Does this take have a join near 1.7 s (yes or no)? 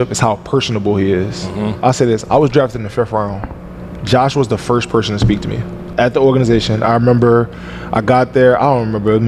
yes